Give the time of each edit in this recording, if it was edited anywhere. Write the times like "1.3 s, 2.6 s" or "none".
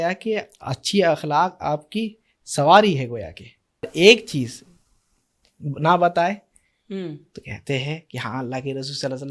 3.8 s